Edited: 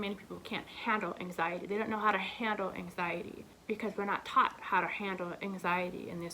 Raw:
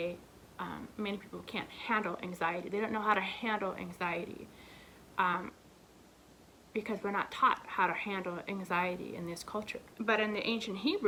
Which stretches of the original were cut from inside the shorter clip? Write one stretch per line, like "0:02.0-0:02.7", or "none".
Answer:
0:04.5-0:06.5